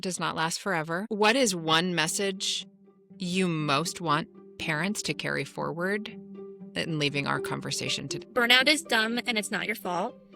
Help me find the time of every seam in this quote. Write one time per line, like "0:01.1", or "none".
0:01.1
0:08.2